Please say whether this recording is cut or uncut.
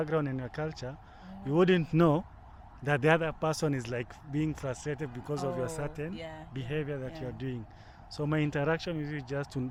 uncut